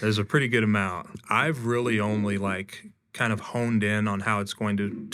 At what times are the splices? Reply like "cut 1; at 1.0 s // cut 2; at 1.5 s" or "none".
cut 1; at 1.0 s